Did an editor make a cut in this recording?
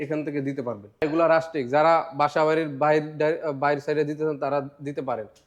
yes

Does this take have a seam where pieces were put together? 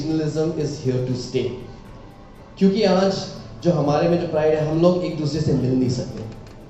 no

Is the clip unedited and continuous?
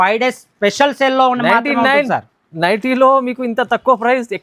yes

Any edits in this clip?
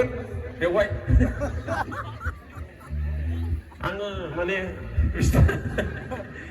no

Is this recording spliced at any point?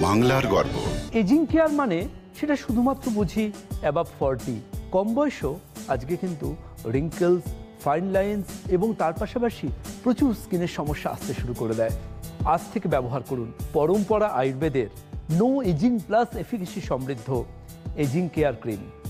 yes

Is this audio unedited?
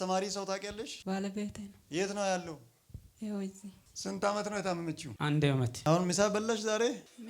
no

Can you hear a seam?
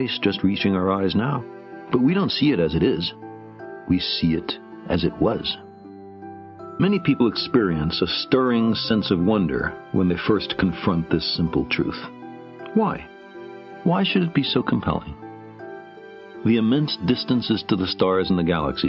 yes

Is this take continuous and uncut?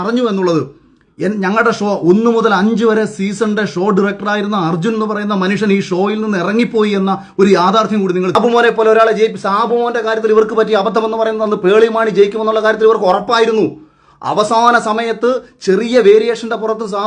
no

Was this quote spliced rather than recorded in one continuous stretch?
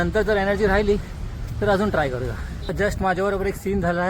yes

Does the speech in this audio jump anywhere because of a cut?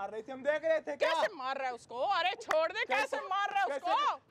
no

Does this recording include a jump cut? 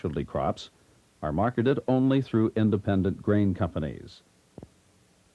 yes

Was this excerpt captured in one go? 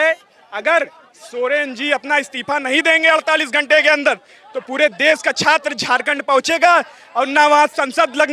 yes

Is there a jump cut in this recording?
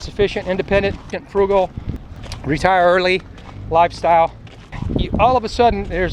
yes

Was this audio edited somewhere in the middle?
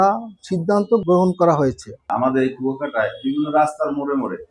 yes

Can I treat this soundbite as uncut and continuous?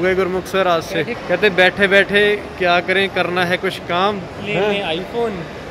no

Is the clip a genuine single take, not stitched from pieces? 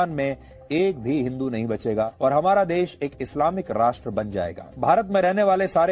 no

